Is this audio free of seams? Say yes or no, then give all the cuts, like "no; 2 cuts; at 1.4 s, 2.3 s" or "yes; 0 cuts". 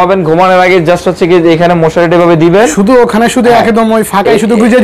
yes; 0 cuts